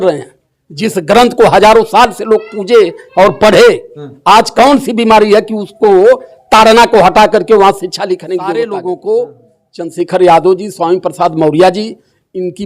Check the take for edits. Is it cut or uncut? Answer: cut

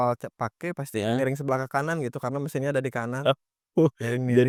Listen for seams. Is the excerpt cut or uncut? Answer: uncut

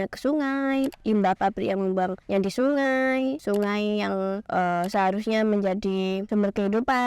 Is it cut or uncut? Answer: cut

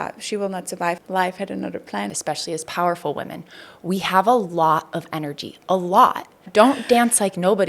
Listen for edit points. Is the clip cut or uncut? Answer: cut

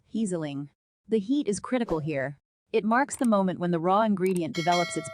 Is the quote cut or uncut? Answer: uncut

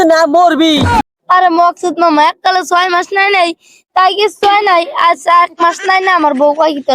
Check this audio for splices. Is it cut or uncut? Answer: cut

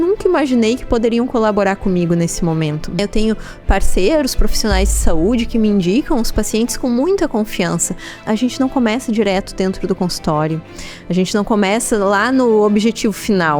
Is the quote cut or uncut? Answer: cut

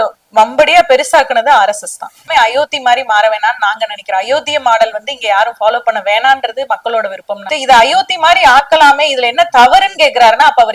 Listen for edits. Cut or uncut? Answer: cut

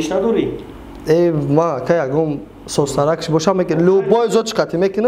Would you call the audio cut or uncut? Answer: uncut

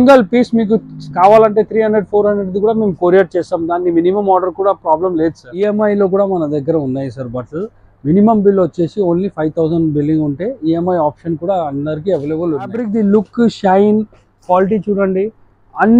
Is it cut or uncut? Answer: cut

